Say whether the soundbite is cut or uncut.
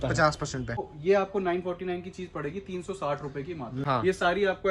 cut